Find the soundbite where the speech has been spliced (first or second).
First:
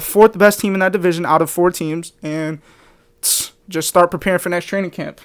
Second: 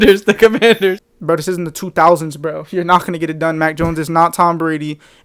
second